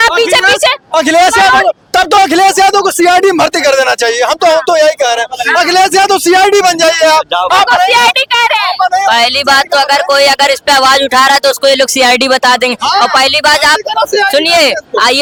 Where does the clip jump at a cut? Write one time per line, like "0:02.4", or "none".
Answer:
none

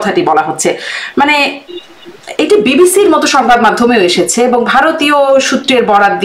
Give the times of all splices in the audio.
none

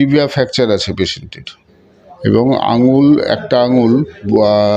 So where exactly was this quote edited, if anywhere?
none

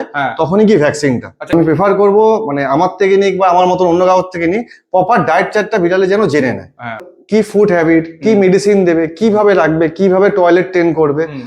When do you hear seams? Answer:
0:01.5
0:07.0

